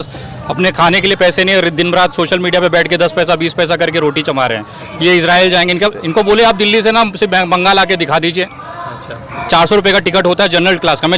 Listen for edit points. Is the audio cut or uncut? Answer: uncut